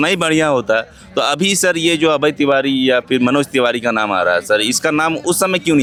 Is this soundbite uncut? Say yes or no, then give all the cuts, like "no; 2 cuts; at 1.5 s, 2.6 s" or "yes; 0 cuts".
yes; 0 cuts